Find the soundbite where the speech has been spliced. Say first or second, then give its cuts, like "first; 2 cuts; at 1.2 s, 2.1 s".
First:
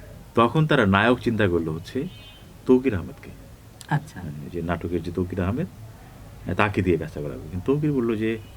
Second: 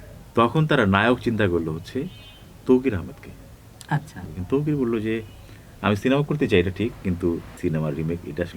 second; 2 cuts; at 4.3 s, 7.5 s